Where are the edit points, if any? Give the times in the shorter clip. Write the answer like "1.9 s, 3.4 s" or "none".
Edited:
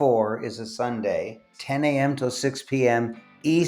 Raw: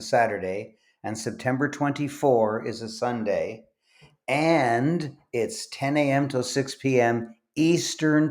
1.5 s